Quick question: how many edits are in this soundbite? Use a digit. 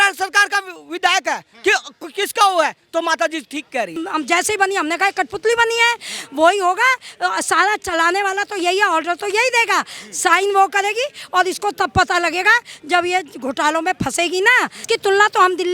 2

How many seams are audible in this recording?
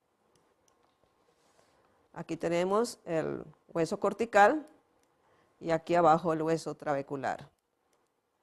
0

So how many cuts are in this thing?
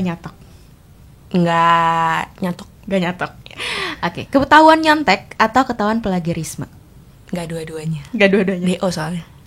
0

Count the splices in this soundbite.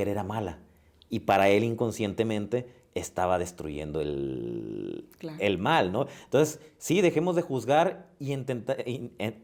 0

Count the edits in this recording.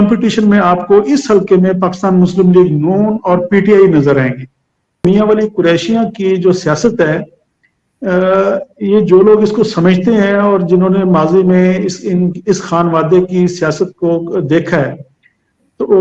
1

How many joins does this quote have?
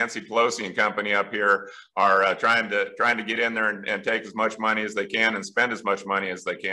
0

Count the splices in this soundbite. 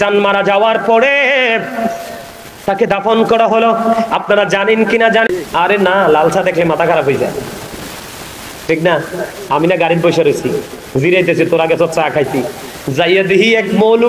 1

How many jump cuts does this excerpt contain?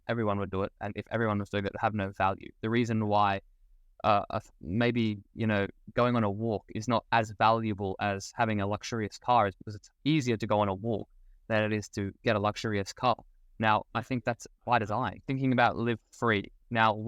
1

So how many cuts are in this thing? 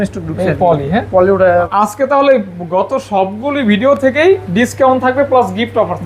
1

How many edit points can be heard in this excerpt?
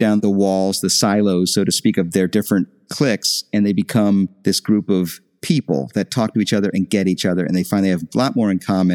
1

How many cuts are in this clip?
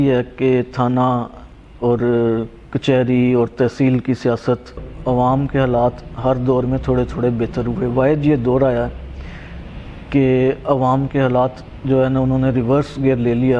1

